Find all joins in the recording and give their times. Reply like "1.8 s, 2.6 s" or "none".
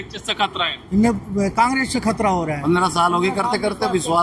2.6 s